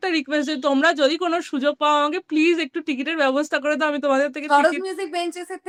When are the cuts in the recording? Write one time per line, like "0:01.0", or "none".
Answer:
none